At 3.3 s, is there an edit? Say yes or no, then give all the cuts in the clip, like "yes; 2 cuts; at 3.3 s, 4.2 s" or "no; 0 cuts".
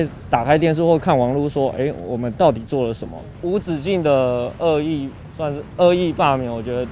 yes; 1 cut; at 3.3 s